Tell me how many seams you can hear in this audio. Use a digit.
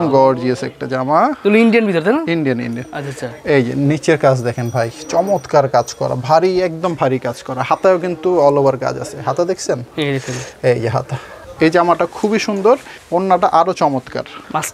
0